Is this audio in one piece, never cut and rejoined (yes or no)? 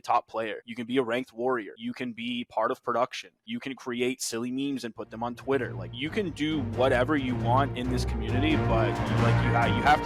yes